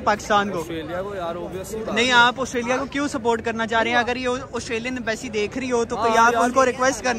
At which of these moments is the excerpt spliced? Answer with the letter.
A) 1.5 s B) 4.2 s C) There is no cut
C